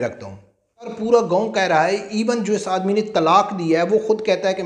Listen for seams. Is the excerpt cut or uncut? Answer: cut